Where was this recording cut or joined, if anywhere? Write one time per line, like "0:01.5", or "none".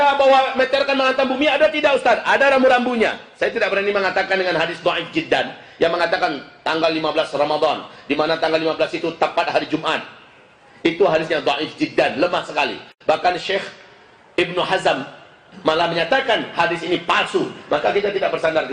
none